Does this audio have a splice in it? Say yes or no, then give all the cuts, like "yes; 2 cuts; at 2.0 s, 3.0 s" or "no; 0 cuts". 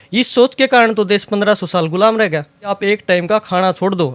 yes; 1 cut; at 2.6 s